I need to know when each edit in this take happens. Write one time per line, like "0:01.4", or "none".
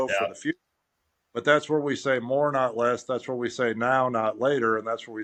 none